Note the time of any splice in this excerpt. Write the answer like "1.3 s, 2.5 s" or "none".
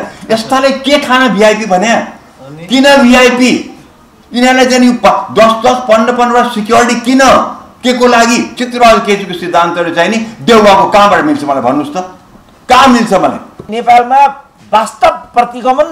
8.6 s, 13.7 s